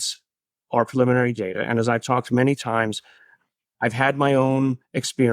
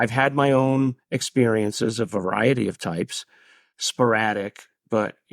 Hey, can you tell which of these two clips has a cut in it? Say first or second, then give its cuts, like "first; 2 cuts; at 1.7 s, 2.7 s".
second; 1 cut; at 3.7 s